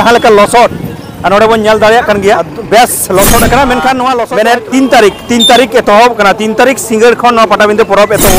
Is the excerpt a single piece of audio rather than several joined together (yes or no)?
no